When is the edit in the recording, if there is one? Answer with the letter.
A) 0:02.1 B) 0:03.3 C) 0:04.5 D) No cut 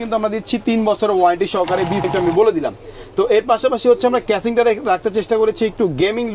A